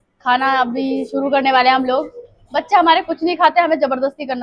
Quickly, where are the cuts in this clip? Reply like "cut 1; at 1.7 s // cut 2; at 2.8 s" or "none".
none